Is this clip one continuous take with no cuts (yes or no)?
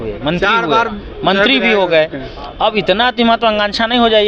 yes